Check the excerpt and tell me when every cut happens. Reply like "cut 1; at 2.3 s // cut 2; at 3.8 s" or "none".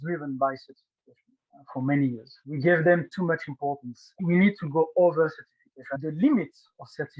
cut 1; at 4.2 s // cut 2; at 5.9 s